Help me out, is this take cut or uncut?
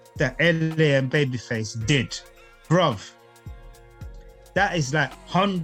uncut